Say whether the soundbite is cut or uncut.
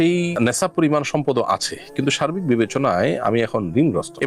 uncut